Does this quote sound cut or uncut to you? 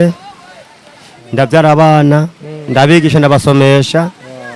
uncut